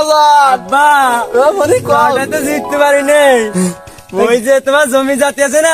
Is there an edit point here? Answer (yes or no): no